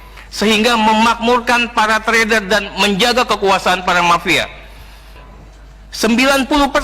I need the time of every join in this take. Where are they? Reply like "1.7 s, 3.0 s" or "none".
5.2 s